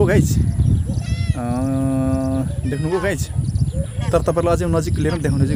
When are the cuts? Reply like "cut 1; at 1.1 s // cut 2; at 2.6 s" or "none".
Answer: none